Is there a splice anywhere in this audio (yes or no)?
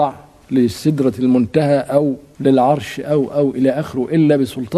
no